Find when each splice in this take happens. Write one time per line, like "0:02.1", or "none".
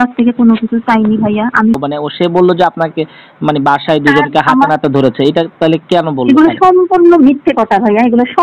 0:01.8